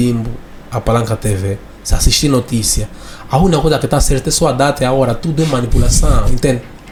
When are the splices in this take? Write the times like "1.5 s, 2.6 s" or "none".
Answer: none